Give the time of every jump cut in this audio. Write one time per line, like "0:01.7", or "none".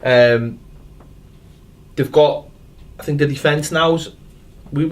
0:02.3